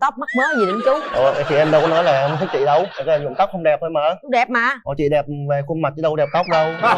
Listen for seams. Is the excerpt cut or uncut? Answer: uncut